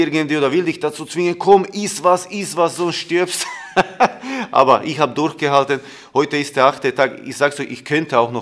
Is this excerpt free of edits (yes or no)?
yes